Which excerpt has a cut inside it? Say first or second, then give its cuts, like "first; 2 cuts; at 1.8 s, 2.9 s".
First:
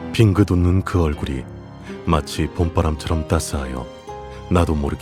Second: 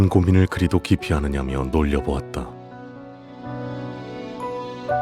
second; 1 cut; at 2.3 s